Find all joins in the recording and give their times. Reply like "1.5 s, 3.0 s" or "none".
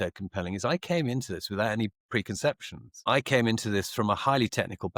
none